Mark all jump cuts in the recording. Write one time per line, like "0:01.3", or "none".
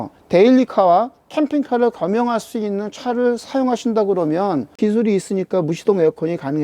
0:04.8